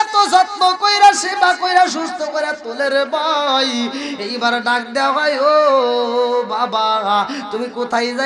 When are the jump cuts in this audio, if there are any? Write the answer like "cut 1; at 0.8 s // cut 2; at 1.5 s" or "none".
none